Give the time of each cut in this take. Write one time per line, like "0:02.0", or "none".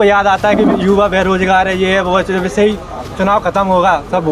none